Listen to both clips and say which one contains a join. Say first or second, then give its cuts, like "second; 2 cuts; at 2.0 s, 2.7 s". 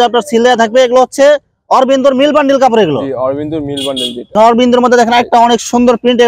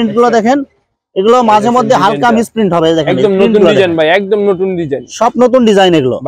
first; 1 cut; at 4.3 s